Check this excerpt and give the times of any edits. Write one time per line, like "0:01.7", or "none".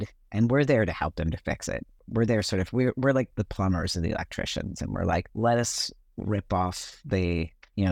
0:01.9
0:03.3
0:05.3